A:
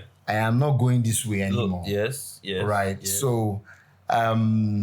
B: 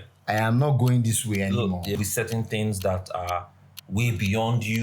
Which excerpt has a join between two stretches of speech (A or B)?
B